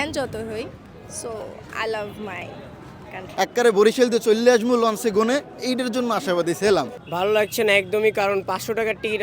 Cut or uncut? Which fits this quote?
cut